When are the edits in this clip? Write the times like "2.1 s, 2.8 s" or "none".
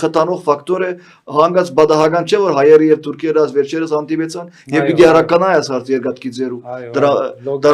none

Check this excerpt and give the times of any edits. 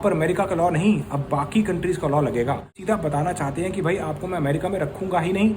2.7 s

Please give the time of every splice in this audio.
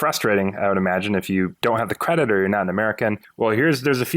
1.5 s, 3.3 s

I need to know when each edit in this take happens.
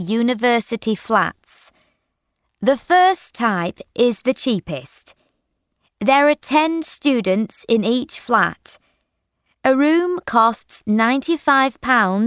2.9 s

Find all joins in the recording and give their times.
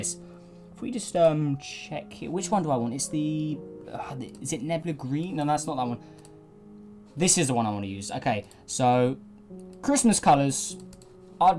9.0 s

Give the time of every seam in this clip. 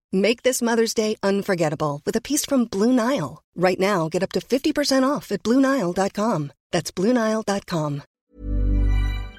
8.1 s

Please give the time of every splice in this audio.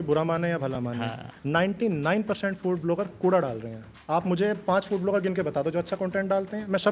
none

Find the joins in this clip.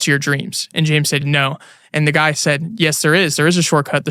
none

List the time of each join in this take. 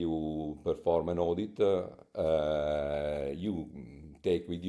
none

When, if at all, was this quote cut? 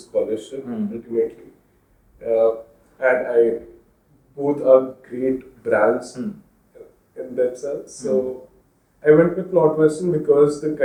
none

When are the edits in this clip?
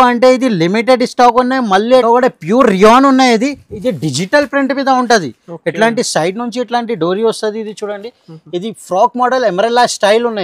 2.0 s

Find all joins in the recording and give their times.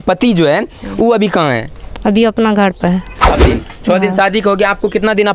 3.5 s

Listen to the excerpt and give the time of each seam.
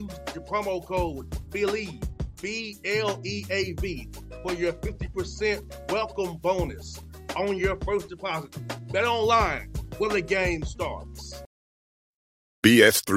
11.4 s

